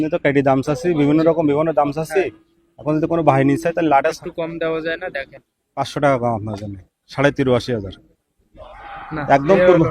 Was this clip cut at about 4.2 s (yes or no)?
yes